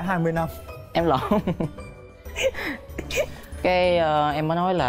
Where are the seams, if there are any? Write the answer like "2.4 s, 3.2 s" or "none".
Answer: none